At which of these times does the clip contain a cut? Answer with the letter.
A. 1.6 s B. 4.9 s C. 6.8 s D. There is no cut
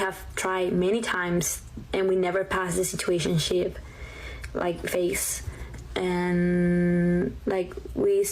B